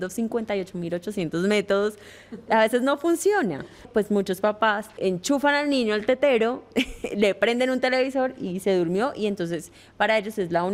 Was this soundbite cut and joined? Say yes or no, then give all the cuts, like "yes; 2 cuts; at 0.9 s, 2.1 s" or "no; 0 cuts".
yes; 2 cuts; at 3.9 s, 5.0 s